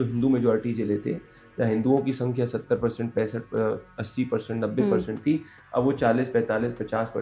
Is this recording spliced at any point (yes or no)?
no